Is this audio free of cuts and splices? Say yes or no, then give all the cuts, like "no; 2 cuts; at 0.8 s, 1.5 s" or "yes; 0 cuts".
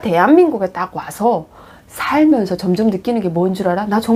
yes; 0 cuts